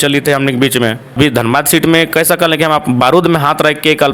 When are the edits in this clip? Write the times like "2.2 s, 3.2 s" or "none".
1.1 s

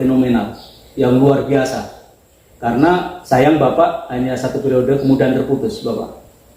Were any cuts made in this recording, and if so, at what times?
3.1 s

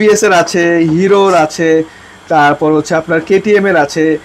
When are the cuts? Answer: none

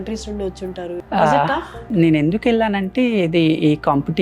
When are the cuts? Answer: 1.0 s, 1.8 s

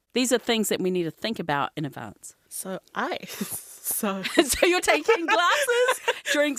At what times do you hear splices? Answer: none

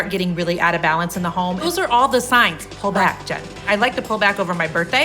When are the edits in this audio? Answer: 1.6 s, 3.5 s

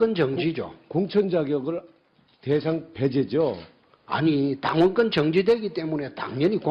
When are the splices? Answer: 1.1 s

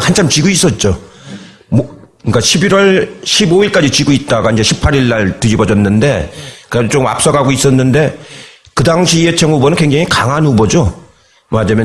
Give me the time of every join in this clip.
none

